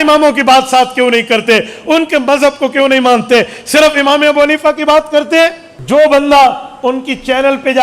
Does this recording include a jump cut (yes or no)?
yes